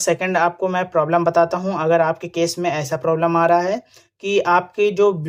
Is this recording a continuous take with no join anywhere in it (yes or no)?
yes